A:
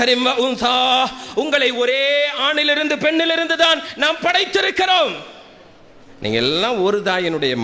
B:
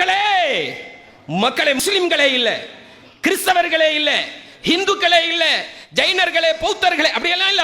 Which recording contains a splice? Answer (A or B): B